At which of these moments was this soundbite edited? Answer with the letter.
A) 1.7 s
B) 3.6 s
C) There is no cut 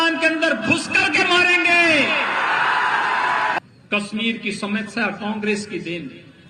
B